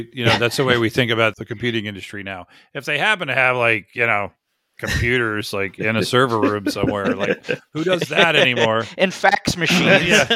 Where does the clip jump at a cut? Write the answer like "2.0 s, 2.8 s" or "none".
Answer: 1.3 s